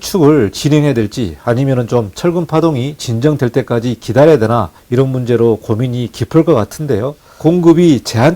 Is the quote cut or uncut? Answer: cut